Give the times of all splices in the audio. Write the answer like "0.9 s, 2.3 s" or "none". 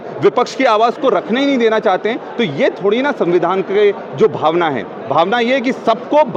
none